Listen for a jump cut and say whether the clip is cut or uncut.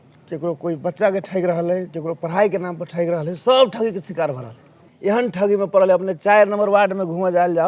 cut